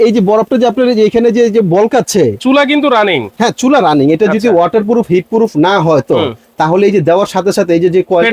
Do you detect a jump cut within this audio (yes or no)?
no